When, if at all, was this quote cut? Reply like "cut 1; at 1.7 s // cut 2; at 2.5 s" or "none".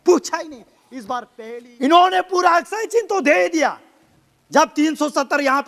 cut 1; at 1.3 s

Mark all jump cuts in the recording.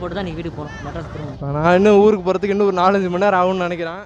none

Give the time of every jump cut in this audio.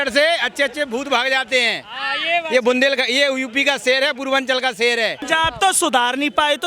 cut 1; at 5.2 s

